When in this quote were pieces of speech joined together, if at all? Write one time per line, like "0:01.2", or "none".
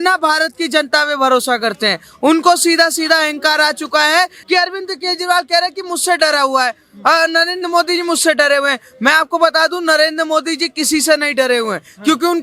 0:04.4

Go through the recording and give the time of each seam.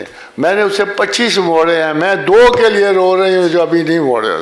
none

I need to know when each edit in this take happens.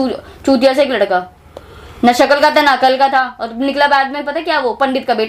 none

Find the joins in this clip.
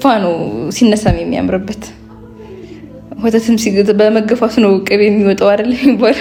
none

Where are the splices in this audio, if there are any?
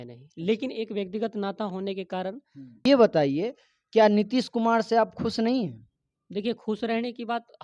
0:02.8

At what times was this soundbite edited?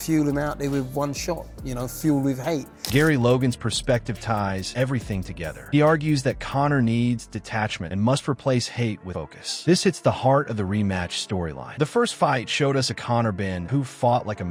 none

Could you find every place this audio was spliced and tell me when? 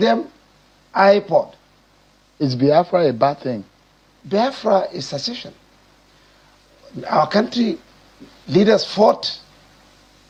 none

